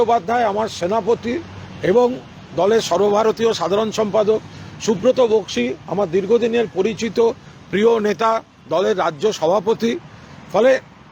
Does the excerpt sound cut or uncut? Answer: uncut